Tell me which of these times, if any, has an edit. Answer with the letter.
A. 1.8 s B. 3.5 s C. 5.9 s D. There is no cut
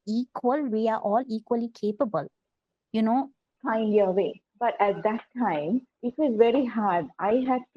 B